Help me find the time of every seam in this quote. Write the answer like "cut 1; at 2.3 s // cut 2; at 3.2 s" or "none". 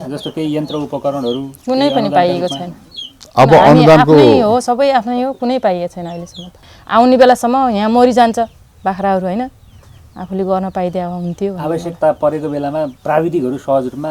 cut 1; at 6.5 s // cut 2; at 13.0 s